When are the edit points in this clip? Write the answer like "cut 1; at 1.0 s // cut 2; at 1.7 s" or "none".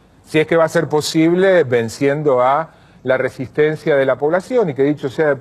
cut 1; at 2.7 s